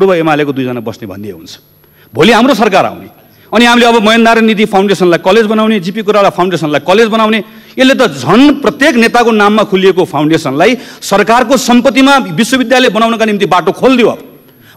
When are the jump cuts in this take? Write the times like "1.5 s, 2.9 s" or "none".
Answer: none